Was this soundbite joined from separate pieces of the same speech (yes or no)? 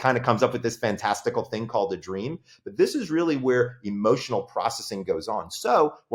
no